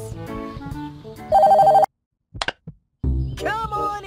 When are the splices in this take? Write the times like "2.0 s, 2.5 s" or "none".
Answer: 2.3 s